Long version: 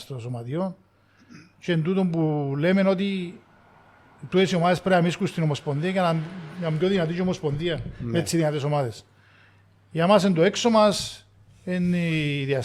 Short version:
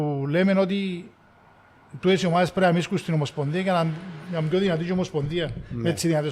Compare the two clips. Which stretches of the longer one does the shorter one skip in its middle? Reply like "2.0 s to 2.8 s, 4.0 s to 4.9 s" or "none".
none